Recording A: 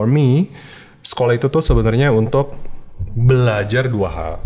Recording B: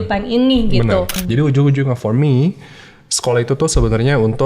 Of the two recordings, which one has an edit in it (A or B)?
B